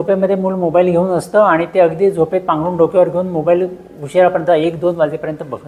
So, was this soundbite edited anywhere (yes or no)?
no